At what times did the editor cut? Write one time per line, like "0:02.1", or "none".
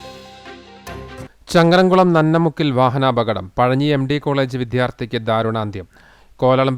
none